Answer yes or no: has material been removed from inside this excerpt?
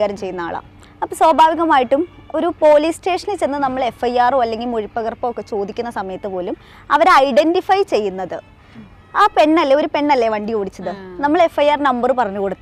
no